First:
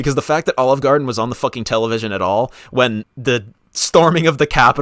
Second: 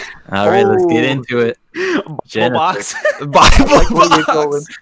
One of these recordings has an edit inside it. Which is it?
first; 1 cut; at 3.1 s

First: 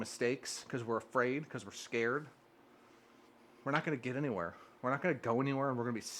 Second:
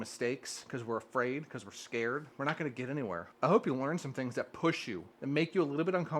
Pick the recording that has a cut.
second; 3 cuts; at 2.3 s, 3.3 s, 5.1 s

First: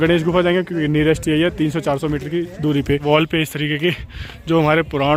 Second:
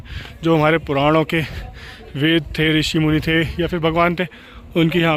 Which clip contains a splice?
first; 1 cut; at 3.0 s

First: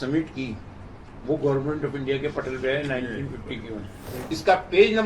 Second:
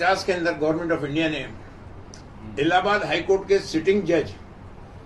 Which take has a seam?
first; 1 cut; at 4.1 s

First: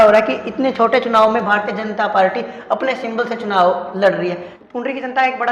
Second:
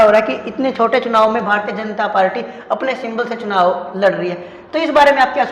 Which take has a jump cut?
first; 1 cut; at 4.5 s

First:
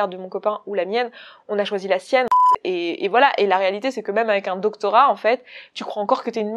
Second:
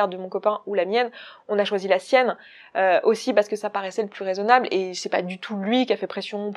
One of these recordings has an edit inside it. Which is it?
first; 1 cut; at 2.5 s

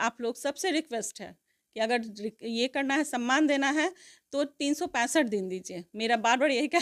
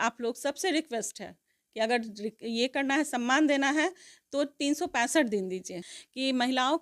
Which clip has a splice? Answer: second; 1 cut; at 5.8 s

